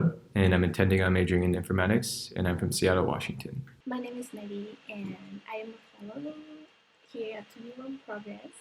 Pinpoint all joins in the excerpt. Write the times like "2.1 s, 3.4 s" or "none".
3.7 s